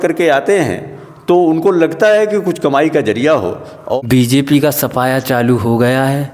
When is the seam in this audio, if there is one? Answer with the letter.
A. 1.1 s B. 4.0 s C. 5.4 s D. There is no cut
B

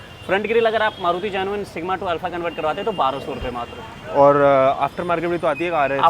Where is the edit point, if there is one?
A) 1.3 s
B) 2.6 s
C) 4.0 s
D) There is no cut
D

